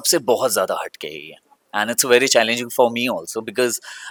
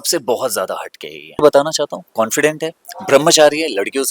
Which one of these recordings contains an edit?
second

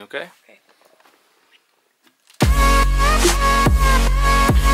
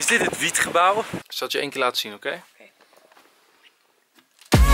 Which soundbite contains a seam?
second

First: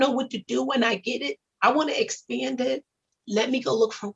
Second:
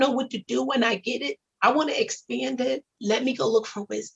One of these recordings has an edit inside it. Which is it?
second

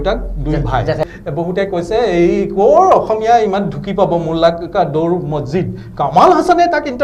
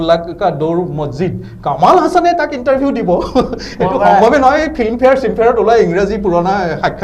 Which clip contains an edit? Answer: first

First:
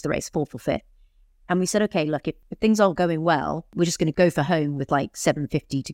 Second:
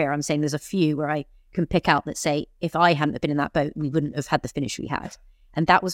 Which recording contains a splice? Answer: first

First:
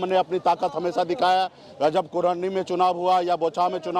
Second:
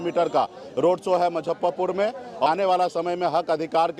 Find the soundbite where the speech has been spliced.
second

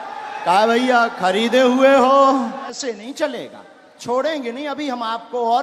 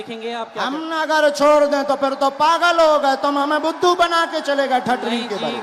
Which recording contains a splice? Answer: first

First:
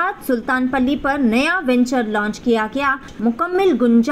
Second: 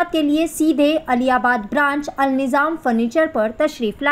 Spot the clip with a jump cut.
first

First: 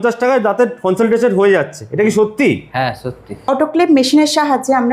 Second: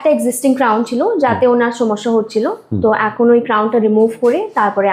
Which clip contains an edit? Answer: first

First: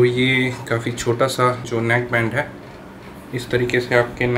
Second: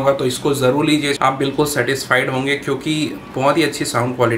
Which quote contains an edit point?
second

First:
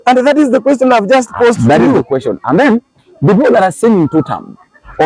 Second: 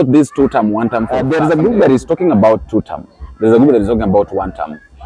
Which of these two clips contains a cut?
second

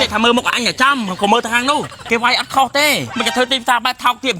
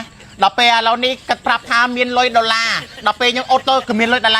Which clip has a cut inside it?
first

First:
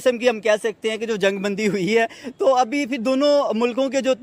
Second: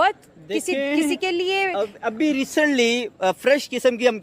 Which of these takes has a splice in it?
second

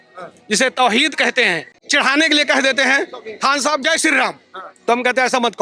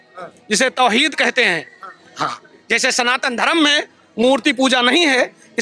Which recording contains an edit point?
first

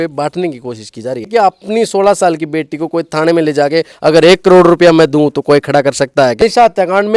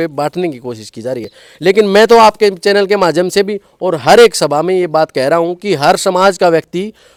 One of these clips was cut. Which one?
first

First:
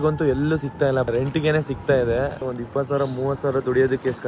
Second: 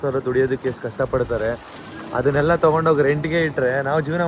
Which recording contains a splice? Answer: first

